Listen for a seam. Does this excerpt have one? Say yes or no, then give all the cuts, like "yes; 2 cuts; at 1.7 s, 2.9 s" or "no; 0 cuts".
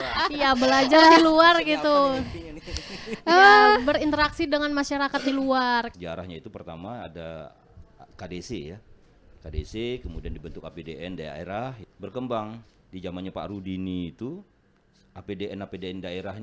yes; 2 cuts; at 5.9 s, 11.8 s